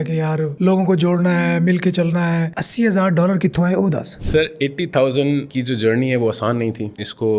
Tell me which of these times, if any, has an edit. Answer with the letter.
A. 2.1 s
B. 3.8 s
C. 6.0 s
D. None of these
D